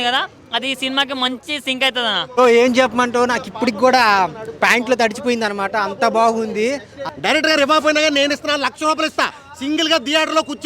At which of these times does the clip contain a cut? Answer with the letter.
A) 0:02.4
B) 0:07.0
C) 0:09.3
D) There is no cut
B